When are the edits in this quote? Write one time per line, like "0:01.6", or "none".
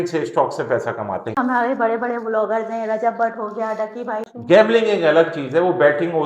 0:01.4
0:04.2